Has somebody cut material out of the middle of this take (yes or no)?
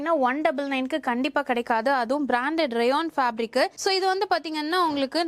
no